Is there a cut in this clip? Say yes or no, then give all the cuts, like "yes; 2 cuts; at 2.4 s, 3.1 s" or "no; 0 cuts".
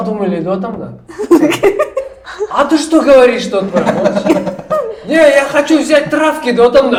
no; 0 cuts